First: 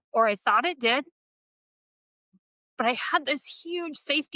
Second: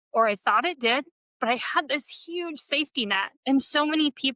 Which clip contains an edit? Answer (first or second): second